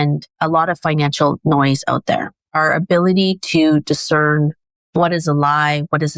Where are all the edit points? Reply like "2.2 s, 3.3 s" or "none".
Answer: 2.5 s